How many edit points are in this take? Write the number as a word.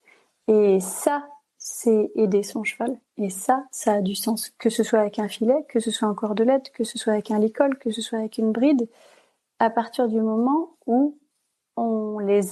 zero